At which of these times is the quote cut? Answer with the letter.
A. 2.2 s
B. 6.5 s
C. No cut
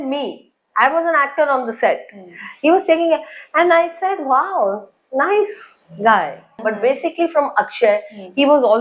B